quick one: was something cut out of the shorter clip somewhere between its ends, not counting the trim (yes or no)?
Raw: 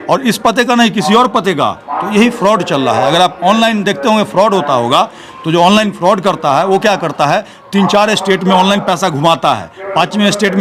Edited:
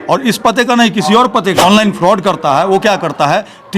yes